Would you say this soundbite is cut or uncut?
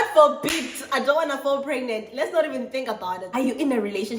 cut